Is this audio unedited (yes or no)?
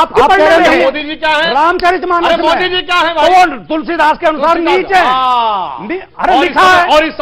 yes